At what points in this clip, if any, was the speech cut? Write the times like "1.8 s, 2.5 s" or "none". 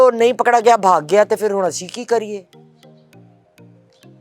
none